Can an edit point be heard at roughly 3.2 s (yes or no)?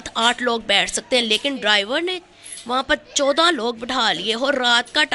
no